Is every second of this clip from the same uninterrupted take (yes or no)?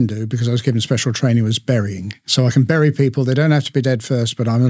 no